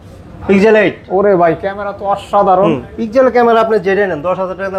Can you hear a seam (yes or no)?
no